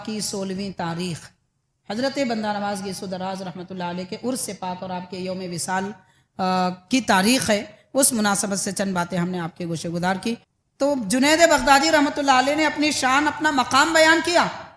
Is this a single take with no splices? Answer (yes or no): no